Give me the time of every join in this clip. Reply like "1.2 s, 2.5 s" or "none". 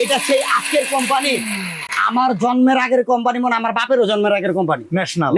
none